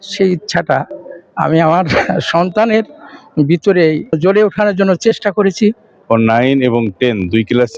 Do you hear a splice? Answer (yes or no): yes